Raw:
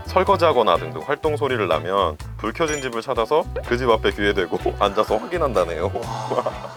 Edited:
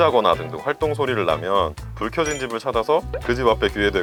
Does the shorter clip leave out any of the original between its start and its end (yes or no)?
no